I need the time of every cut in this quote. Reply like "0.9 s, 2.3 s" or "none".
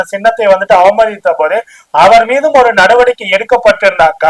none